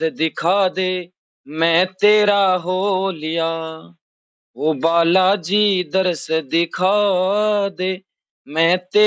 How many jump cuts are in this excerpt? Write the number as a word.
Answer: zero